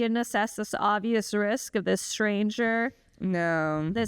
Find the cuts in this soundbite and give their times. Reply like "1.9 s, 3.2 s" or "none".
none